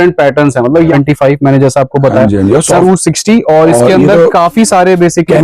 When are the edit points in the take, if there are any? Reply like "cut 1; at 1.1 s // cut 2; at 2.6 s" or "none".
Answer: cut 1; at 0.9 s // cut 2; at 2.8 s

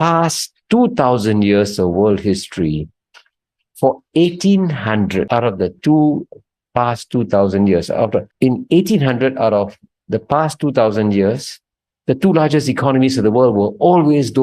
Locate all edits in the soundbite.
cut 1; at 5.3 s // cut 2; at 8.3 s

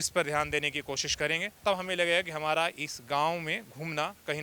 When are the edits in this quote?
none

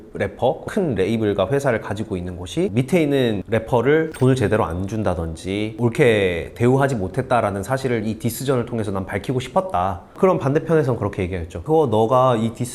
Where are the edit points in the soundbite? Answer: cut 1; at 10.0 s // cut 2; at 11.6 s

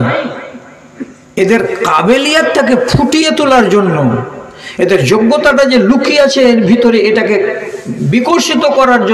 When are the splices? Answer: none

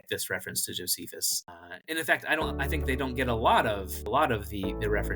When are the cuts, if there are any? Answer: cut 1; at 1.5 s // cut 2; at 3.9 s

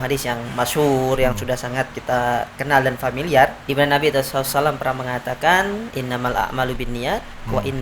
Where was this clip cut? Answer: cut 1; at 1.9 s // cut 2; at 3.6 s // cut 3; at 5.9 s

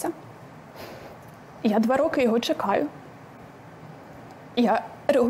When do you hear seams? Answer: none

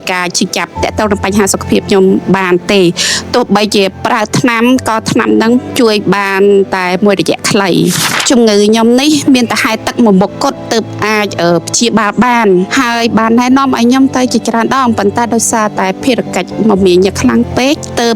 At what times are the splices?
cut 1; at 8.1 s

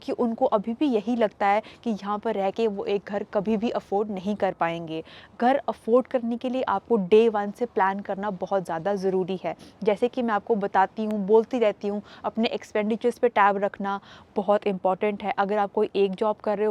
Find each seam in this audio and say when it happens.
none

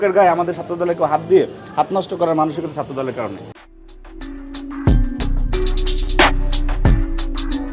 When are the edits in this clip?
none

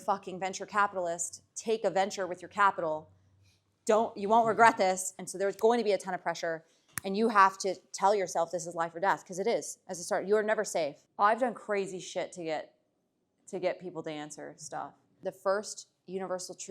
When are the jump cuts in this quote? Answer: cut 1; at 5.2 s // cut 2; at 11.0 s // cut 3; at 15.1 s

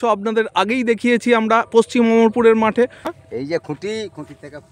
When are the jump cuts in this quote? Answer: cut 1; at 3.2 s

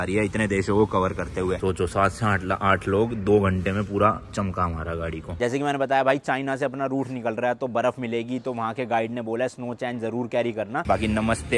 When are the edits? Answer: cut 1; at 1.6 s // cut 2; at 5.3 s // cut 3; at 10.8 s

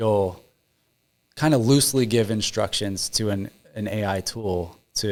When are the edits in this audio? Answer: none

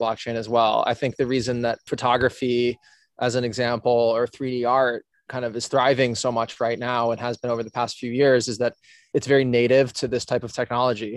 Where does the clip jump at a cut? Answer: cut 1; at 1.9 s // cut 2; at 9.1 s

